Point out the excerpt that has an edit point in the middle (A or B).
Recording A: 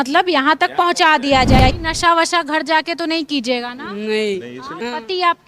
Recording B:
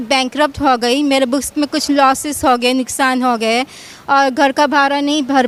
A